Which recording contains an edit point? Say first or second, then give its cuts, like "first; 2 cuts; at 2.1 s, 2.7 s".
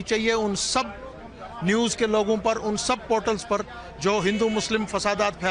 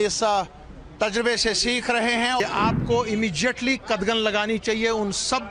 second; 1 cut; at 2.4 s